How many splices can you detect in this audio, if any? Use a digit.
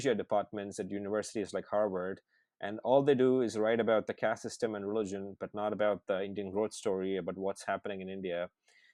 0